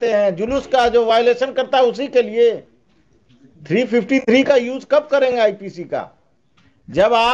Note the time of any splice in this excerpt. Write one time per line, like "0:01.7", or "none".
none